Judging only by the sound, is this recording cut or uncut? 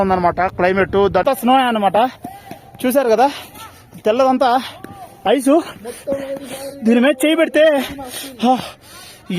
cut